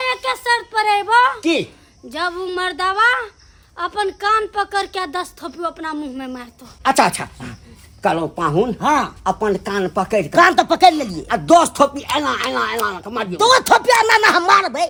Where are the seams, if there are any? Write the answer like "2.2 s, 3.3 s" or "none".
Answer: none